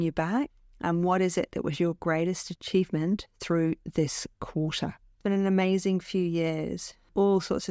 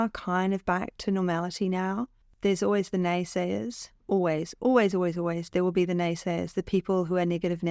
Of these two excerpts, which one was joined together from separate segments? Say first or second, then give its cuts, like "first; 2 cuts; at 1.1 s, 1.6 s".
first; 1 cut; at 5.0 s